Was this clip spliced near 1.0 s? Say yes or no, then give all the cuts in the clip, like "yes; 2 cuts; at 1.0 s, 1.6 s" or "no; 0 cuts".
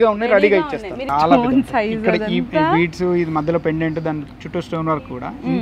yes; 1 cut; at 1.0 s